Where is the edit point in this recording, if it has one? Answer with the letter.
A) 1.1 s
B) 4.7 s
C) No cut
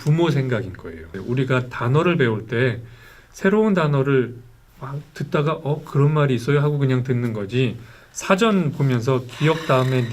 A